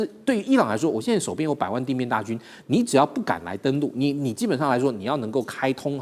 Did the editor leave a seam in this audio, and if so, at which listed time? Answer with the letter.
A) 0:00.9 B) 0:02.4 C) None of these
C